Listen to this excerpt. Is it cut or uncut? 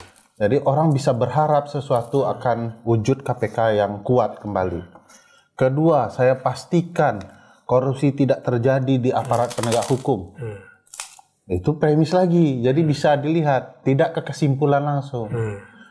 uncut